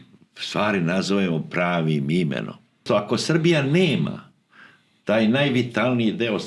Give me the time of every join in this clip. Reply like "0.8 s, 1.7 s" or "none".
2.8 s

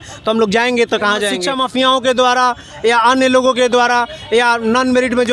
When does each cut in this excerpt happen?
1.4 s

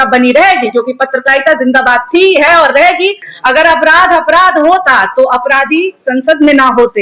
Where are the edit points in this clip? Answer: 3.3 s

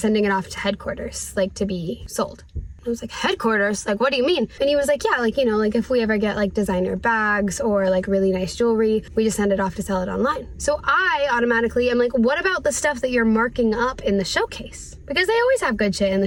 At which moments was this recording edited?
none

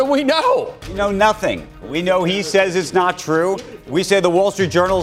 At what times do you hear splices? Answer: 1.0 s

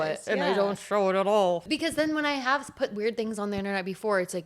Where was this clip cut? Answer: 1.6 s

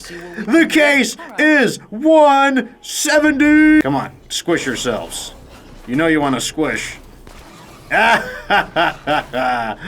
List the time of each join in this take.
3.8 s

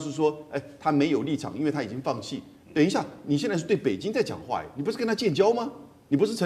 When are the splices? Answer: none

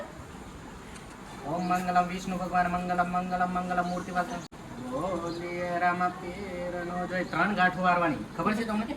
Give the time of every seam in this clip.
4.6 s

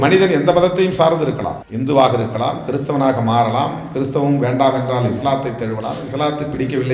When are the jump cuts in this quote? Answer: 1.6 s

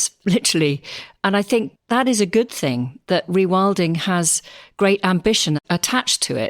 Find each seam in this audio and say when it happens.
1.7 s, 5.6 s

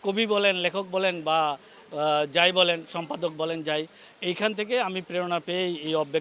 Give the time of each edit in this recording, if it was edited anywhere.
none

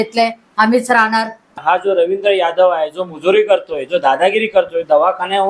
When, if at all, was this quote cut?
1.6 s

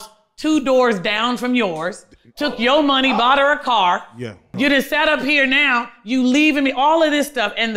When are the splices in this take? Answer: 4.5 s

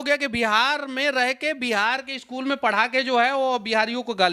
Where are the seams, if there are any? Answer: none

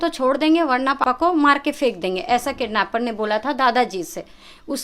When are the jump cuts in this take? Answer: 1.0 s

